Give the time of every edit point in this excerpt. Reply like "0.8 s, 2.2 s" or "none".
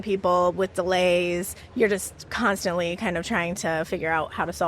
1.6 s